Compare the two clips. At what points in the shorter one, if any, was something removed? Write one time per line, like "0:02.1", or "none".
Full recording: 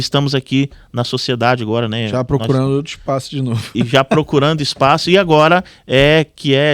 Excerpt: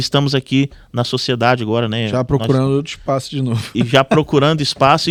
none